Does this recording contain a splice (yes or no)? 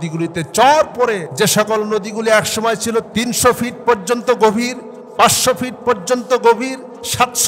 yes